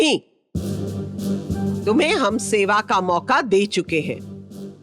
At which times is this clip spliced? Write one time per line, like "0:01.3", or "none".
0:01.8

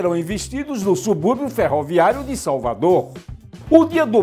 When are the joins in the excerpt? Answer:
0:03.2

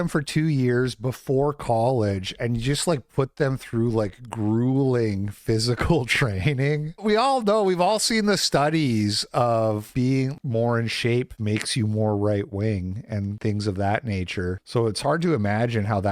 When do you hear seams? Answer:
none

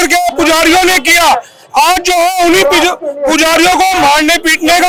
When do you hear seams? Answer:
none

